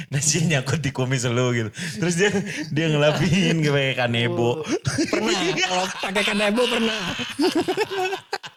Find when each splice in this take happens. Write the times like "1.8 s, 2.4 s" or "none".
none